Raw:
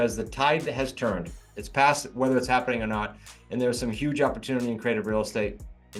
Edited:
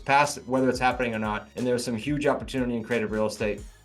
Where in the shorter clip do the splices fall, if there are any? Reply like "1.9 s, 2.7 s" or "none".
1.5 s